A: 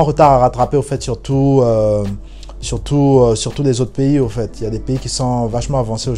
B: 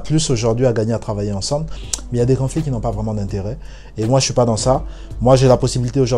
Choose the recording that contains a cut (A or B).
B